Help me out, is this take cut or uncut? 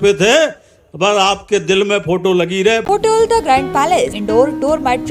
cut